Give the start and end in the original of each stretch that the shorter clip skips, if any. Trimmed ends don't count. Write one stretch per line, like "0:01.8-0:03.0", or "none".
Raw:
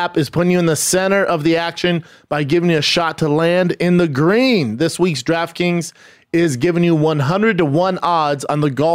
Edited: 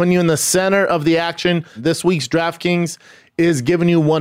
0:02.2-0:04.7